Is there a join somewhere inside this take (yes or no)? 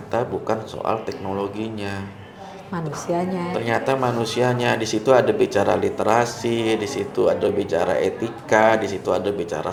no